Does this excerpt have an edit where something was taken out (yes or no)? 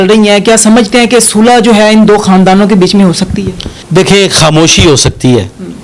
no